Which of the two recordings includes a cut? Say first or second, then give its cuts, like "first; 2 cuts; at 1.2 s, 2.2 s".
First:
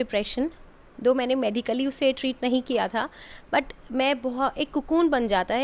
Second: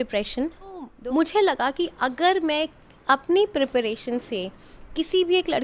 second; 1 cut; at 0.9 s